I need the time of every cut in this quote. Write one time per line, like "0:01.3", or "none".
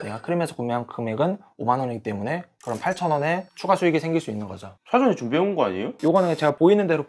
none